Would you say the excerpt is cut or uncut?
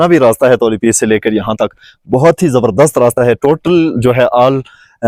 uncut